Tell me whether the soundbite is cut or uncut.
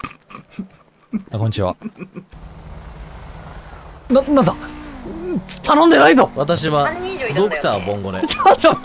cut